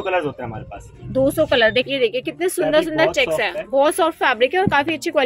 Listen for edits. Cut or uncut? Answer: cut